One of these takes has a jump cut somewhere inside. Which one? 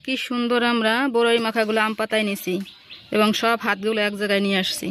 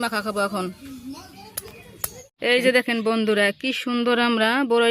second; 1 cut; at 2.4 s

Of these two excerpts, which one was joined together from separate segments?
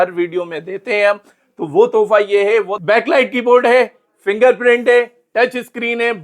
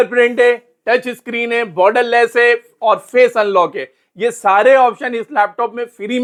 first; 1 cut; at 2.8 s

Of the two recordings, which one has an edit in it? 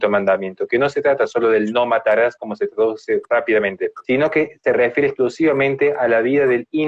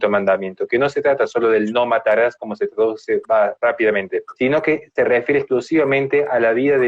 first; 1 cut; at 3.2 s

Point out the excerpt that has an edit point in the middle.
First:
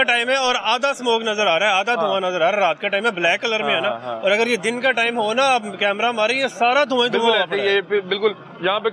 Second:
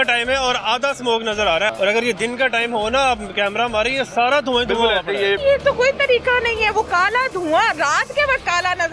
second; 2 cuts; at 1.7 s, 5.4 s

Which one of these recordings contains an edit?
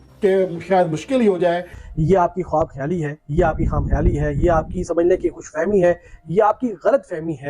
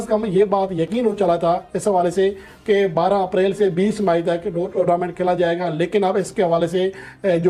first; 1 cut; at 1.7 s

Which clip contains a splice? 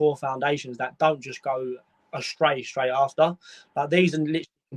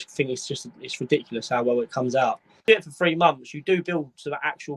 second; 1 cut; at 2.5 s

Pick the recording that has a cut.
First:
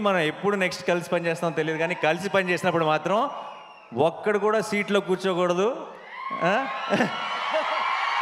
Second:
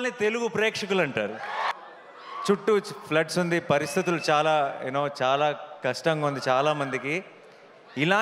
second; 1 cut; at 1.7 s

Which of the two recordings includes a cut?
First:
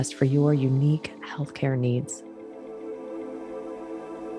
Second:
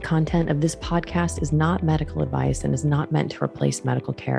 first; 1 cut; at 2.1 s

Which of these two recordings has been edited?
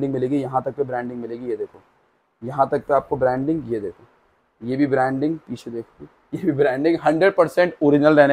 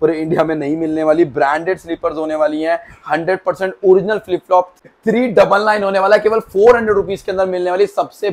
second; 1 cut; at 4.8 s

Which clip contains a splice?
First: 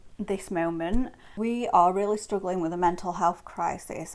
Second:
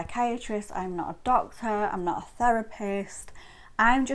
first; 1 cut; at 1.1 s

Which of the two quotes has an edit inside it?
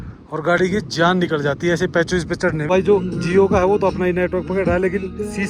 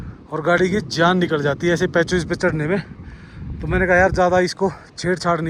first; 1 cut; at 2.6 s

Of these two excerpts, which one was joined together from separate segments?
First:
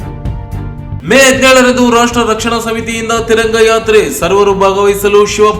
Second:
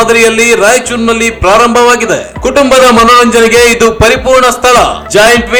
first; 1 cut; at 1.0 s

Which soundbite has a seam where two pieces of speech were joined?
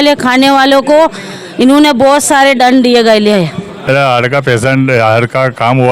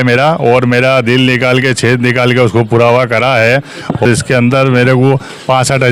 first; 1 cut; at 3.8 s

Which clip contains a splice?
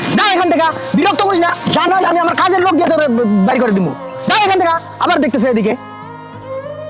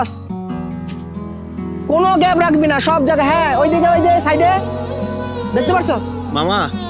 first; 1 cut; at 5.9 s

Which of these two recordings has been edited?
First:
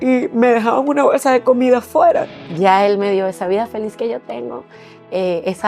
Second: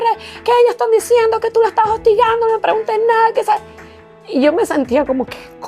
first; 1 cut; at 2.4 s

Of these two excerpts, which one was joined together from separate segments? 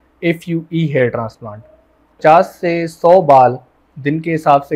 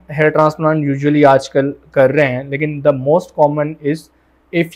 first; 1 cut; at 2.2 s

